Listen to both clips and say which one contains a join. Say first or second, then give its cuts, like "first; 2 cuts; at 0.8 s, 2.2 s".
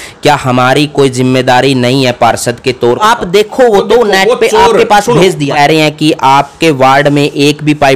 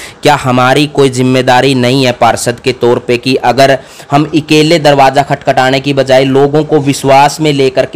first; 2 cuts; at 3.0 s, 5.5 s